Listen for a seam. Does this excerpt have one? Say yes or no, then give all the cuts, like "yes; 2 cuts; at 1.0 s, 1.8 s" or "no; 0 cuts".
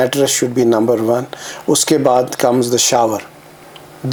no; 0 cuts